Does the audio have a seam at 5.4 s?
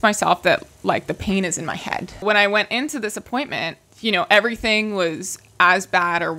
no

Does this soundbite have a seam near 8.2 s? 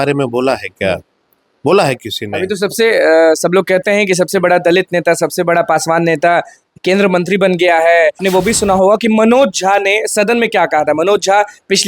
yes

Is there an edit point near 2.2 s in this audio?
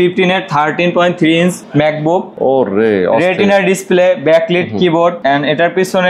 yes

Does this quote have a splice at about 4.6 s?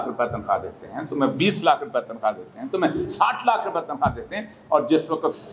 no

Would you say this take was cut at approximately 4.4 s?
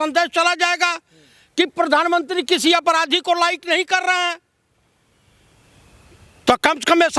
no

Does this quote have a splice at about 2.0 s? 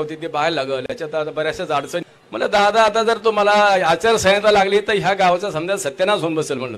yes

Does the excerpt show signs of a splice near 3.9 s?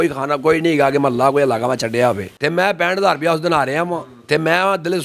no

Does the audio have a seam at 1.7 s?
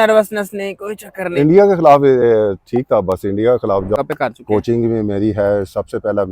no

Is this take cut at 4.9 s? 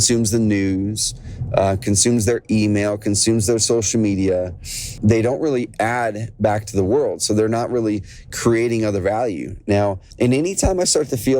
yes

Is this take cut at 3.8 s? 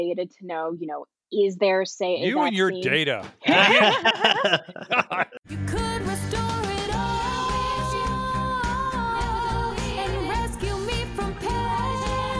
no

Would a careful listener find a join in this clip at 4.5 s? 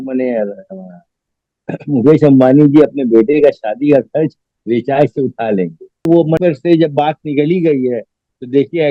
no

